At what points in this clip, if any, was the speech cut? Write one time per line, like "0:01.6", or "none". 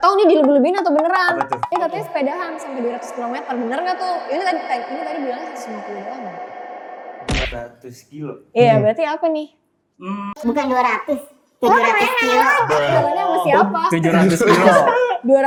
none